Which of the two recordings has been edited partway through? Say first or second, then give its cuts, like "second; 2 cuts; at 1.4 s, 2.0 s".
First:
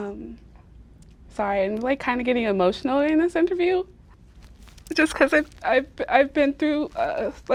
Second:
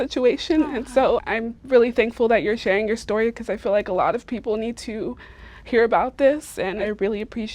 second; 1 cut; at 1.2 s